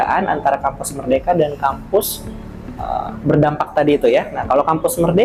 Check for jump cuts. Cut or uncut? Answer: uncut